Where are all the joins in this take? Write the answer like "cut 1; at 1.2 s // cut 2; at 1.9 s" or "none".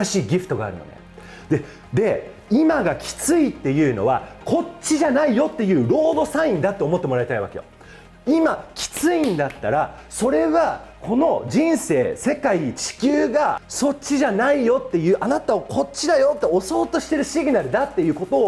cut 1; at 13.7 s